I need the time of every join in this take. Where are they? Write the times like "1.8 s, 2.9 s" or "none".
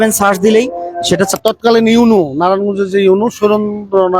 1.3 s